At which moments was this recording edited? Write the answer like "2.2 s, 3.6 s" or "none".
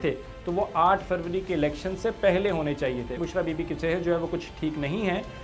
3.1 s